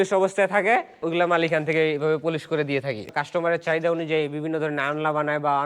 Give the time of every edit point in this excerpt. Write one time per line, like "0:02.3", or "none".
0:01.0
0:03.1